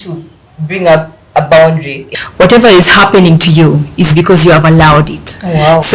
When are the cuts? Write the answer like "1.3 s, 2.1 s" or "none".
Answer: 2.0 s